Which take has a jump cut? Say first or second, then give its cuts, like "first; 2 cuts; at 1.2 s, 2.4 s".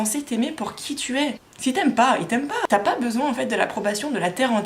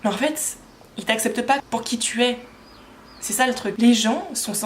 second; 2 cuts; at 1.6 s, 3.8 s